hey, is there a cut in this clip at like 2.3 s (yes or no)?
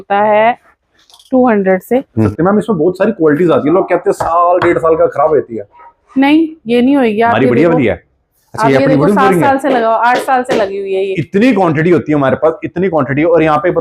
yes